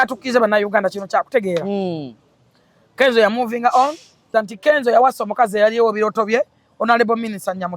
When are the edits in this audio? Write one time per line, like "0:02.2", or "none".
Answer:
0:04.2